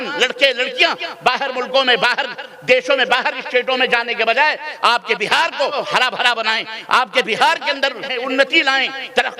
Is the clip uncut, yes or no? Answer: no